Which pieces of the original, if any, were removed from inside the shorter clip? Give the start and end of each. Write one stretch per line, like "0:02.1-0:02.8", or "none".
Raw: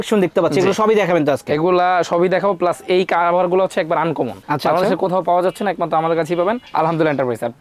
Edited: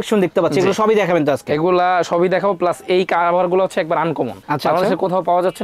none